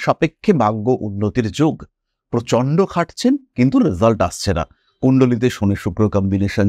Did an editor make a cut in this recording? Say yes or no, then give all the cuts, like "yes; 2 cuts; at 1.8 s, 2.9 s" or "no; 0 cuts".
no; 0 cuts